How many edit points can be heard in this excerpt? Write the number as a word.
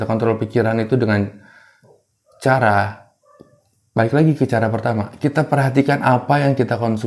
zero